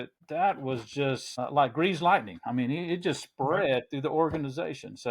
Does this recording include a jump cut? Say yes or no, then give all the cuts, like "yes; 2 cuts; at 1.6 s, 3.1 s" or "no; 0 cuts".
no; 0 cuts